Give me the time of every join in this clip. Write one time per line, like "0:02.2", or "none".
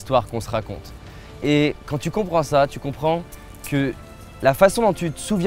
none